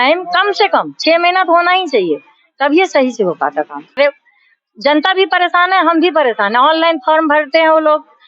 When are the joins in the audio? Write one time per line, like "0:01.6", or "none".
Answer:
0:04.0